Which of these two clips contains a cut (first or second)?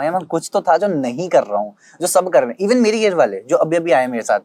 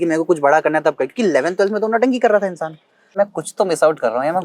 second